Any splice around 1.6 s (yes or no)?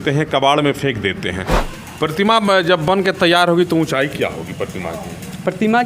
yes